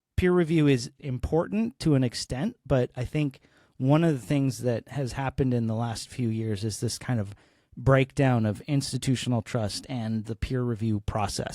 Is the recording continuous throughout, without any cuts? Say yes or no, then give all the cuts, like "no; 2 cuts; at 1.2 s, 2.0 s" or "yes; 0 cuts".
no; 1 cut; at 0.9 s